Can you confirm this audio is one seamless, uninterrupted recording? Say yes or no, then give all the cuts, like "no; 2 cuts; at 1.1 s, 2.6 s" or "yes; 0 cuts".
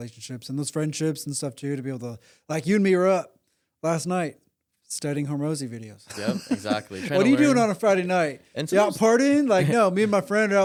yes; 0 cuts